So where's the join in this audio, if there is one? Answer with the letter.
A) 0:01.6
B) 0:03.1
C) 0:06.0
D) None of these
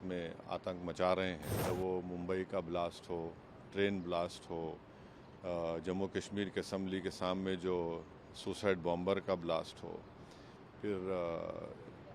A